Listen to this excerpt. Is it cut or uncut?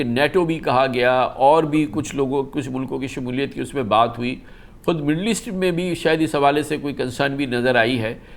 uncut